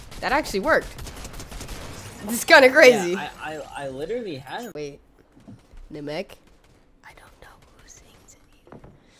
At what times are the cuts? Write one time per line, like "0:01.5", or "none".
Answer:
none